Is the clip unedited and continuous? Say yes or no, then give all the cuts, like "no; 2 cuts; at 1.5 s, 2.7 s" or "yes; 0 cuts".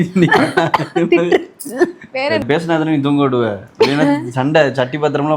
no; 1 cut; at 2.4 s